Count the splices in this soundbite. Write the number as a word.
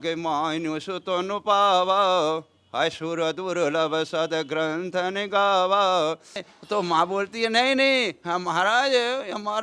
one